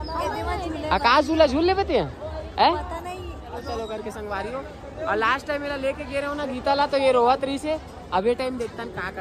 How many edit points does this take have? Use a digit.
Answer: 1